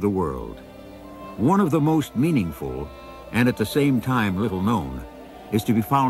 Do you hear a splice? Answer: yes; 1 cut; at 2.5 s

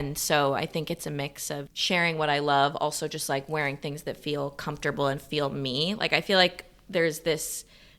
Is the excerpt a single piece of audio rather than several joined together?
yes; 0 cuts

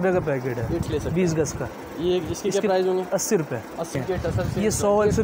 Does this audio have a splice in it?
yes; 2 cuts; at 0.8 s, 3.9 s

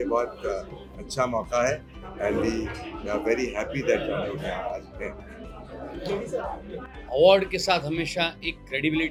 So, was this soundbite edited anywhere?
no; 0 cuts

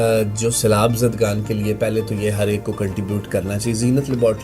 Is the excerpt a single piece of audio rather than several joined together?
yes; 0 cuts

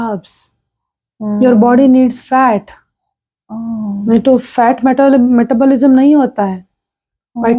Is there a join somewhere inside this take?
no; 0 cuts

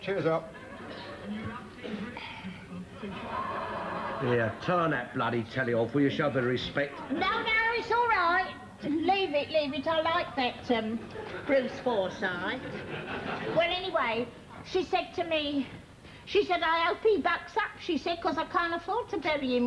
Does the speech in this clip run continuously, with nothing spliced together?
no; 1 cut; at 7.8 s

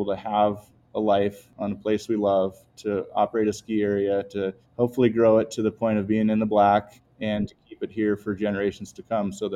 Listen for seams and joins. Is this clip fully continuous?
no; 3 cuts; at 1.5 s, 4.6 s, 7.0 s

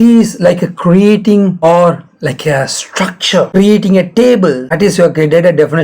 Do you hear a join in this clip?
yes; 3 cuts; at 1.5 s, 3.5 s, 4.7 s

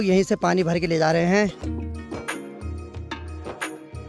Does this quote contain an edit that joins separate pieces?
no; 0 cuts

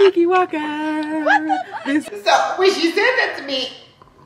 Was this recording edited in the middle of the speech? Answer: yes; 1 cut; at 2.1 s

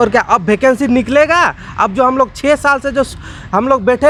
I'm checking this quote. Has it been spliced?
no; 0 cuts

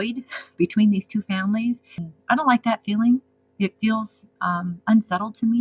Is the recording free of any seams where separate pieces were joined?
no; 1 cut; at 2.1 s

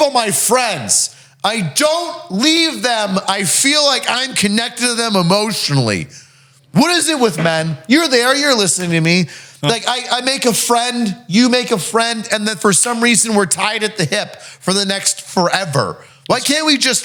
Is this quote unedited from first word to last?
yes; 0 cuts

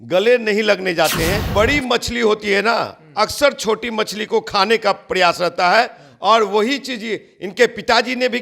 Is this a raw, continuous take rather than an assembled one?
no; 1 cut; at 1.5 s

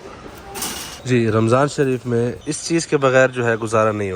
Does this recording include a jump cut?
no; 0 cuts

